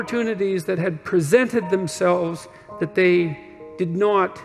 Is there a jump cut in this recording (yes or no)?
no